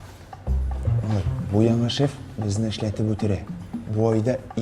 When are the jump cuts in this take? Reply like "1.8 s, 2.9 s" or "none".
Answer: 3.6 s

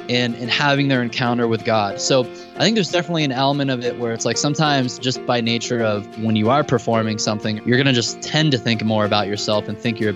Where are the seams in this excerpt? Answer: 6.1 s, 7.6 s, 8.3 s

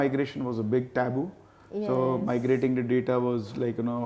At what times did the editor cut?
none

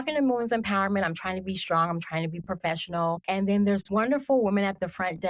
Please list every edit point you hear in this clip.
3.2 s

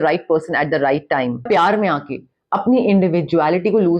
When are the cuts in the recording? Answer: 1.4 s

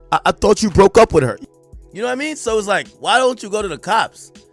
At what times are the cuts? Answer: 1.4 s

